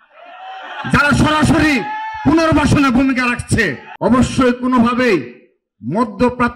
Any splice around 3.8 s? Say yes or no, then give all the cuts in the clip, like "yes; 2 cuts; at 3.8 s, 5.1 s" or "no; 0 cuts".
yes; 1 cut; at 3.8 s